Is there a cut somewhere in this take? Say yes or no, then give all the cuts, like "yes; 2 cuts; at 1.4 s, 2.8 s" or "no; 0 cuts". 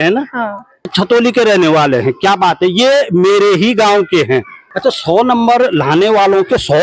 yes; 2 cuts; at 0.9 s, 4.6 s